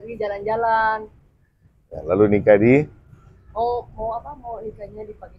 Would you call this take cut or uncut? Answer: uncut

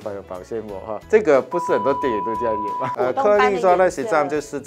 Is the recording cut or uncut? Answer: cut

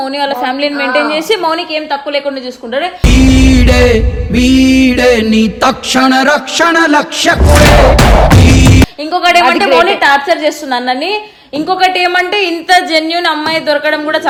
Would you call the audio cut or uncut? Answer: uncut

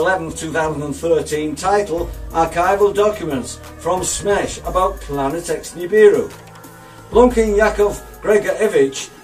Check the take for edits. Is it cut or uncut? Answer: uncut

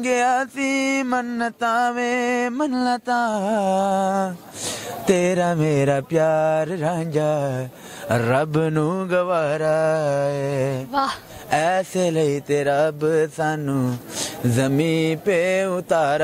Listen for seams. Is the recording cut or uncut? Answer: uncut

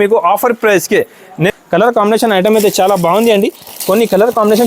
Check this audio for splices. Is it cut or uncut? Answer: cut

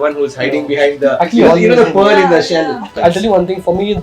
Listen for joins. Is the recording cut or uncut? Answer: cut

